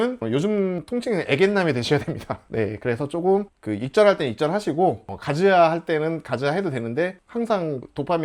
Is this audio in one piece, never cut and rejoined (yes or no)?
yes